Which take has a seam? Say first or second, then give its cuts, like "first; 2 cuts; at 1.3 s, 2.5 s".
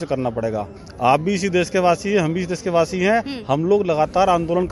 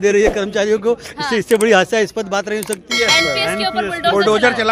second; 1 cut; at 3.0 s